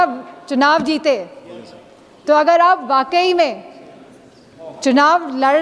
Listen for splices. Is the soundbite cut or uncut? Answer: uncut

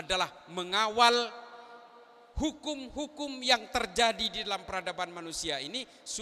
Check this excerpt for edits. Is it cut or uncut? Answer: uncut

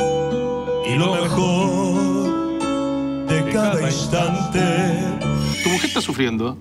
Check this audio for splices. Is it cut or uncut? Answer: cut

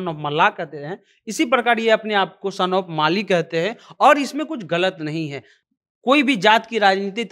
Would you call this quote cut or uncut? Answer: uncut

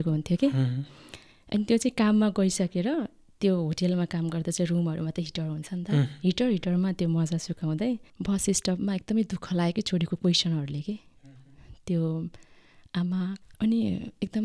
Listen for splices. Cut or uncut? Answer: cut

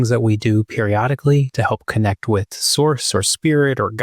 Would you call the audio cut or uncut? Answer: uncut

